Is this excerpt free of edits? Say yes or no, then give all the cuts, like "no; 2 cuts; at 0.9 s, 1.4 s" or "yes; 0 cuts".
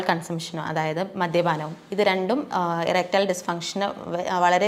yes; 0 cuts